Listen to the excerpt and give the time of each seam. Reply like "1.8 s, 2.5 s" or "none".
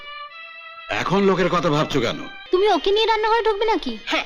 2.3 s